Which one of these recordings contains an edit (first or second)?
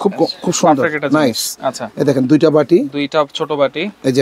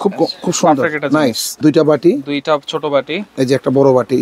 second